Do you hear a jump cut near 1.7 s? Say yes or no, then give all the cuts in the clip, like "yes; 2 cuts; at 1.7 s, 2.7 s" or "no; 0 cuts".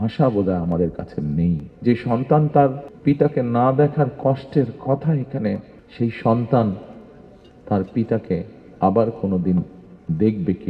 yes; 3 cuts; at 1.7 s, 2.9 s, 5.8 s